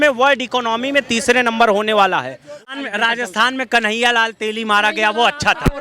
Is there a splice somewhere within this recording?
yes; 1 cut; at 2.7 s

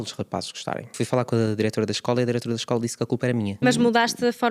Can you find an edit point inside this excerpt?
yes; 2 cuts; at 0.9 s, 3.6 s

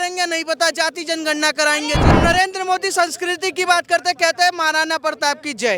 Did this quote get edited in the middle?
yes; 1 cut; at 2.1 s

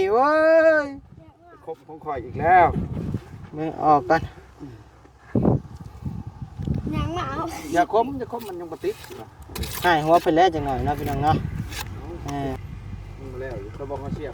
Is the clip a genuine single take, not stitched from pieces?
no; 1 cut; at 12.6 s

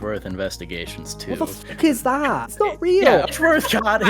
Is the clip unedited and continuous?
no; 2 cuts; at 2.5 s, 3.3 s

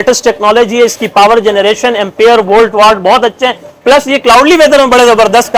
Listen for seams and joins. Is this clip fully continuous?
yes; 0 cuts

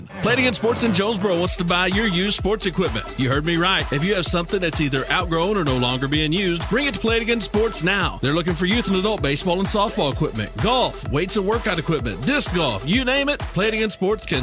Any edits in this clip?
no; 0 cuts

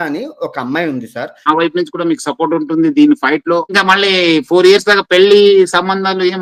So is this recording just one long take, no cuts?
no; 2 cuts; at 1.5 s, 3.7 s

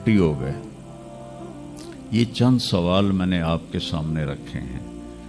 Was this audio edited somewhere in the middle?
no; 0 cuts

